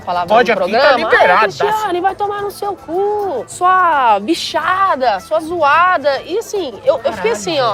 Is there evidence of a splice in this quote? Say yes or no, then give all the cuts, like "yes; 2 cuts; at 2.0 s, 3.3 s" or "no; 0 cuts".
no; 0 cuts